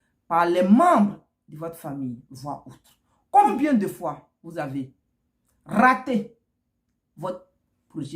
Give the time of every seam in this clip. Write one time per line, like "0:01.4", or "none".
0:03.4